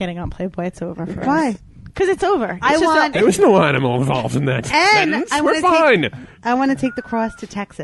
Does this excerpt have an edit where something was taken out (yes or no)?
no